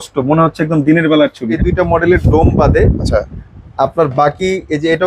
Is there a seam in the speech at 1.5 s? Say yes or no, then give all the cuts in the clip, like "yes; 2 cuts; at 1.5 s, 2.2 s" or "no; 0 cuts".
yes; 1 cut; at 1.5 s